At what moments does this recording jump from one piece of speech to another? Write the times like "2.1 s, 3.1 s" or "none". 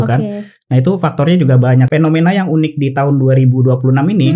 1.9 s

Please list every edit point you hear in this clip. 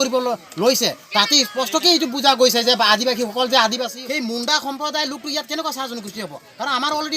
3.9 s

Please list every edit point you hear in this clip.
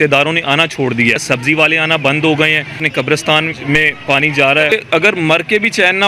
1.2 s, 2.8 s, 4.7 s

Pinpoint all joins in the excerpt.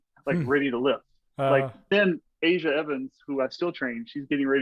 1.9 s

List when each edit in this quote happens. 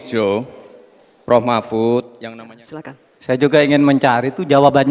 2.2 s

